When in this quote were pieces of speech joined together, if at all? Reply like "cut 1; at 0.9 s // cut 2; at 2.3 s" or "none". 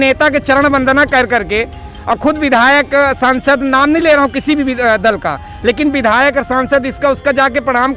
none